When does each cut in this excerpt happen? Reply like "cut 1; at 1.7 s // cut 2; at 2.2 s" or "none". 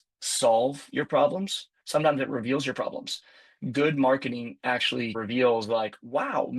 cut 1; at 5.2 s